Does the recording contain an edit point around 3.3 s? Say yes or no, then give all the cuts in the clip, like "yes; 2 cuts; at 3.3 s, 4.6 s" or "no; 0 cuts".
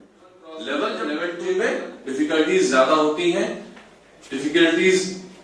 no; 1 cut; at 1.0 s